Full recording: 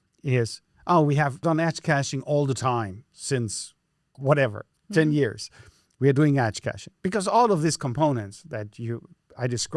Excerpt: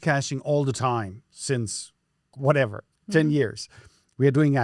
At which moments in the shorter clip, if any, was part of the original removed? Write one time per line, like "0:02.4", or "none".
none